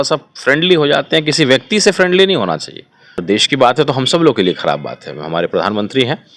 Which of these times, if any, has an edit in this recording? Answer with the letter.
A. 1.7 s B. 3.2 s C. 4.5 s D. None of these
B